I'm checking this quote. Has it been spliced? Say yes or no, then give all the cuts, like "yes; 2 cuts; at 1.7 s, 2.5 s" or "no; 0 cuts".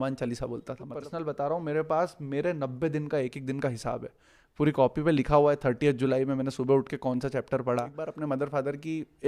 yes; 2 cuts; at 1.0 s, 8.1 s